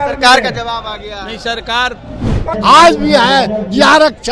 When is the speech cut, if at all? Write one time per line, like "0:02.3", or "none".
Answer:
0:02.5